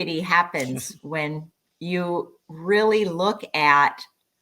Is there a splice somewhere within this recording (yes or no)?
no